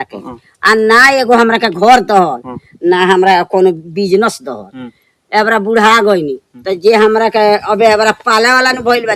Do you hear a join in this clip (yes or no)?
no